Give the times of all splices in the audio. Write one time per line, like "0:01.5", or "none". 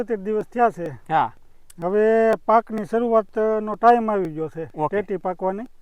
none